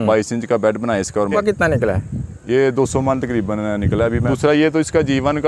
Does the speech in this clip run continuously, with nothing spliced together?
no; 2 cuts; at 1.3 s, 4.3 s

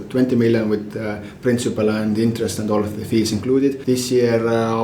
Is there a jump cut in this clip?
yes; 1 cut; at 3.8 s

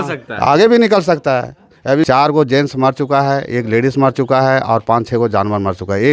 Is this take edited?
yes; 1 cut; at 2.1 s

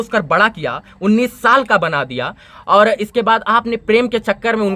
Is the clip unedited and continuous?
yes; 0 cuts

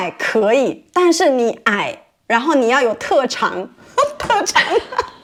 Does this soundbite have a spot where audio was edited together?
no; 0 cuts

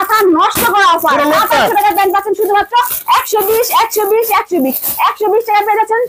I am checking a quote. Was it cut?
no; 0 cuts

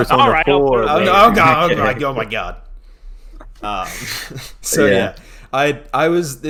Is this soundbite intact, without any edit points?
yes; 0 cuts

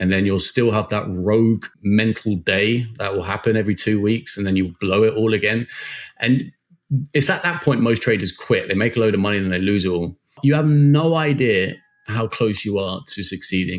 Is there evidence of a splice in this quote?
yes; 2 cuts; at 1.7 s, 10.3 s

